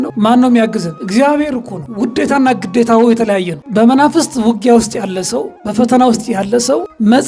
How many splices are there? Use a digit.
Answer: 1